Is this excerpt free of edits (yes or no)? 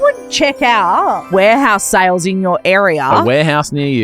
no